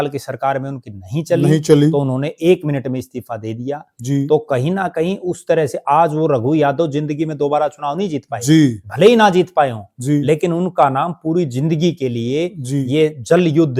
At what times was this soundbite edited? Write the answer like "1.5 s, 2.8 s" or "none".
none